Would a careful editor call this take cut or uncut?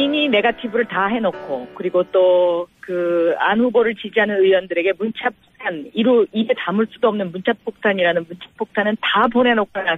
uncut